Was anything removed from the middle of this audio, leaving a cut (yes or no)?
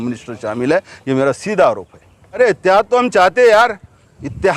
yes